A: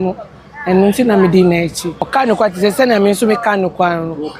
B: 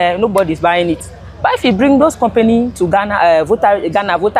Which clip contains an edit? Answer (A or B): A